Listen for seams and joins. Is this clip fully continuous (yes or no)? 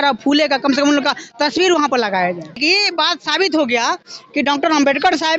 no